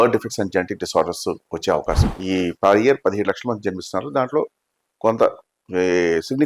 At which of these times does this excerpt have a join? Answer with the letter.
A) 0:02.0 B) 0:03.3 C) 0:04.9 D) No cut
A